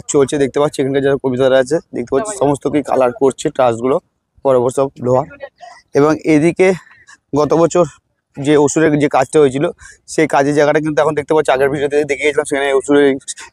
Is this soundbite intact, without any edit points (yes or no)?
yes